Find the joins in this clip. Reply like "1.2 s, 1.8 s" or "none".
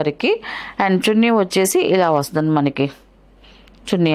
none

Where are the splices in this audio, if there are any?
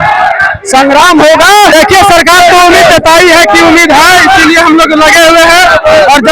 1.7 s

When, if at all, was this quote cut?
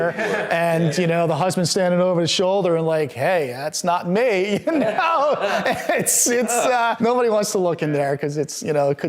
6.9 s

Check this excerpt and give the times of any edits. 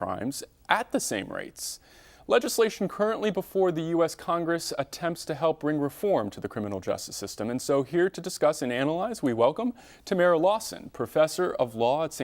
8.8 s

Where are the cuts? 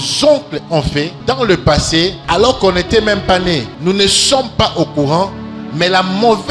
1.1 s, 2.2 s, 3.7 s

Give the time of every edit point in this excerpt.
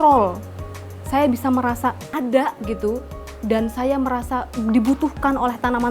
2.1 s

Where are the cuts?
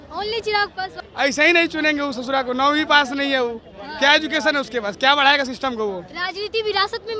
1.0 s

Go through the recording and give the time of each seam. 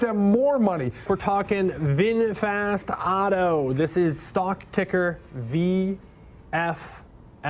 0.9 s

